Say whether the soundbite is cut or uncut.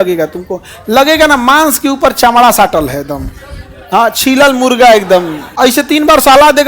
cut